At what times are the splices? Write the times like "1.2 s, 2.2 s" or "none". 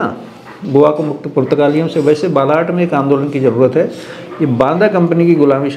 none